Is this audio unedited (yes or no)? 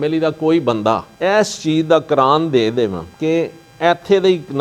yes